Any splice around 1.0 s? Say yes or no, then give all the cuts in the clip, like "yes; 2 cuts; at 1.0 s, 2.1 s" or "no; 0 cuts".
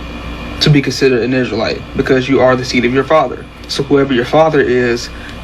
yes; 1 cut; at 1.0 s